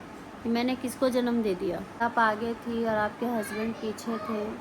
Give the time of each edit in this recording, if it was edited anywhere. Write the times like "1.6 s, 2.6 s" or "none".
1.9 s